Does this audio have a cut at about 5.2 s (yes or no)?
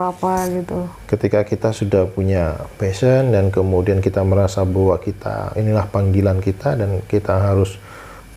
no